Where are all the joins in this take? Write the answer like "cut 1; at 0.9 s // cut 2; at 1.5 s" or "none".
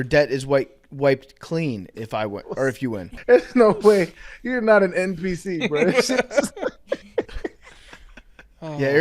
cut 1; at 3.1 s